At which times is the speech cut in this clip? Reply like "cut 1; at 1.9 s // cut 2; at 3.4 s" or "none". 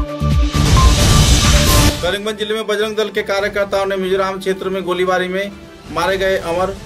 cut 1; at 1.9 s